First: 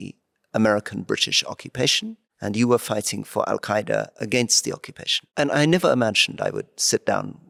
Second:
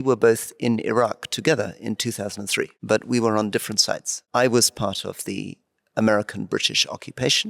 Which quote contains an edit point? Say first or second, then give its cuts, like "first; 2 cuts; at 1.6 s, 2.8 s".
second; 2 cuts; at 2.8 s, 4.2 s